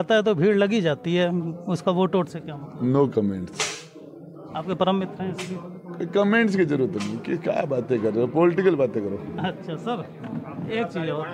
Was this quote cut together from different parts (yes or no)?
no